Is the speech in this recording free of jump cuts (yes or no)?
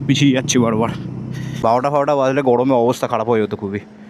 no